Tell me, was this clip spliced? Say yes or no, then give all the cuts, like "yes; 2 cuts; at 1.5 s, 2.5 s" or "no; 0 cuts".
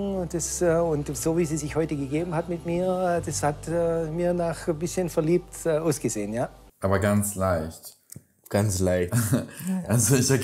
no; 0 cuts